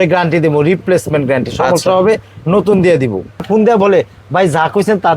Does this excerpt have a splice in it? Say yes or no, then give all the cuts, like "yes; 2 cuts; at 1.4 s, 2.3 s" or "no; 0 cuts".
yes; 1 cut; at 3.4 s